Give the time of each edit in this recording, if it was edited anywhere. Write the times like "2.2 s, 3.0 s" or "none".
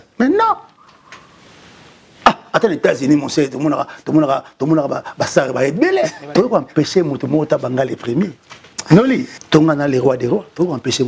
6.2 s, 9.3 s